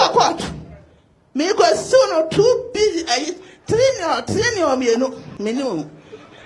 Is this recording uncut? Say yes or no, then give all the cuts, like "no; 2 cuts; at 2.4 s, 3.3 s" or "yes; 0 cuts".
no; 1 cut; at 5.3 s